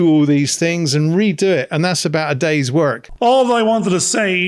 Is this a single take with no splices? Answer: no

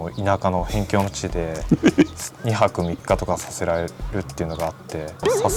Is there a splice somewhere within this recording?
no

